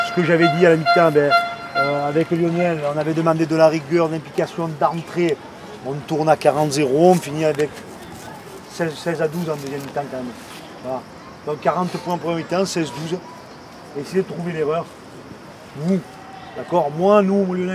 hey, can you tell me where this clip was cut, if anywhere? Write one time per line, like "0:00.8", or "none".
none